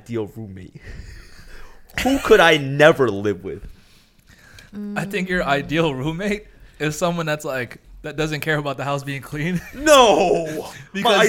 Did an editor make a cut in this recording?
no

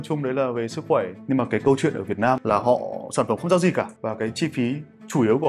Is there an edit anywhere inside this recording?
yes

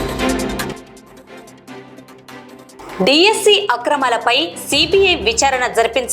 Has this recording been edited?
yes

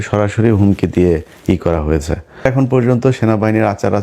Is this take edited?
yes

